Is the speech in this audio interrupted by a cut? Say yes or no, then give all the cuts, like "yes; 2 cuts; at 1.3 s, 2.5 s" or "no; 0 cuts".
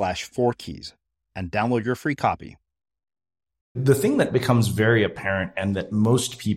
yes; 1 cut; at 3.8 s